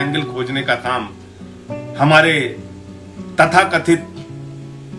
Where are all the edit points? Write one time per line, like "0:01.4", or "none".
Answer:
none

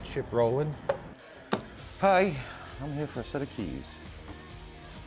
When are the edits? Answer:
0:01.1

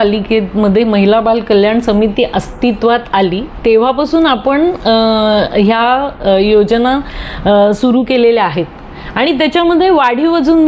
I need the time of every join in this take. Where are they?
none

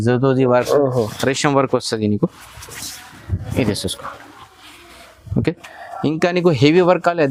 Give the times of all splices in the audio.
none

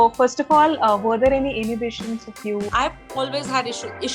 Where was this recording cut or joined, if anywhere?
0:02.7

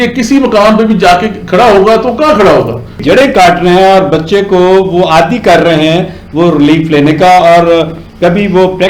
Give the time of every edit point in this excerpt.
0:02.9

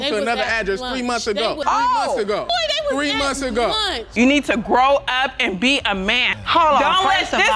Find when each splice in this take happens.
0:04.2

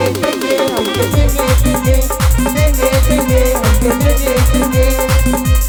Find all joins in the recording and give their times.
none

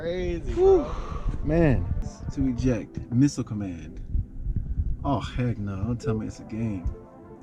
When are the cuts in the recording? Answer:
0:02.1

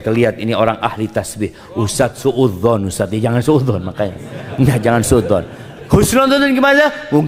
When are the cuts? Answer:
none

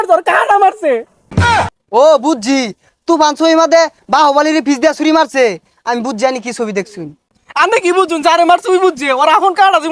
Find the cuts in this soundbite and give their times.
none

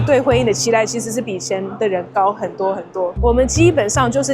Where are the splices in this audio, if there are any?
0:03.2

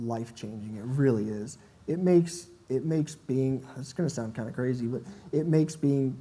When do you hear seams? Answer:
none

